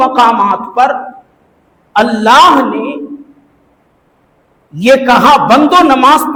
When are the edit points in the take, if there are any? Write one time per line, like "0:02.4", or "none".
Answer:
none